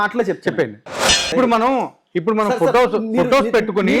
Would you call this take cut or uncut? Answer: cut